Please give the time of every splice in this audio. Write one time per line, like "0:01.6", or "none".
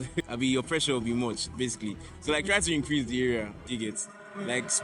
0:03.6